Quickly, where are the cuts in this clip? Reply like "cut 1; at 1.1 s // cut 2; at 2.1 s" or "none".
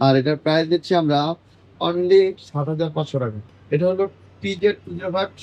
cut 1; at 3.4 s